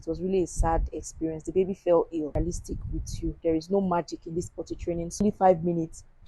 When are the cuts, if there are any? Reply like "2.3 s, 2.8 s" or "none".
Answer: 2.3 s, 5.2 s